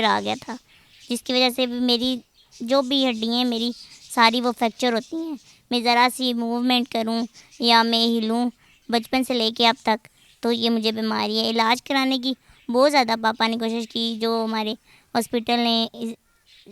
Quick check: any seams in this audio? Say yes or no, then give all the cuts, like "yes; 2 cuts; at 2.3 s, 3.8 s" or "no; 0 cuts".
no; 0 cuts